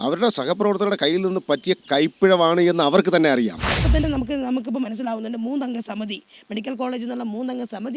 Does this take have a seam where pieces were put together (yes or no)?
yes